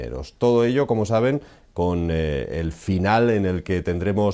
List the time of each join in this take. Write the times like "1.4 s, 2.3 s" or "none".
2.8 s